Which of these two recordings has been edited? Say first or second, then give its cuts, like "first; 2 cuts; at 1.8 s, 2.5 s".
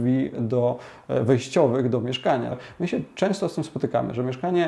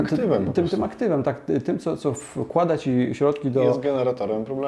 first; 1 cut; at 2.6 s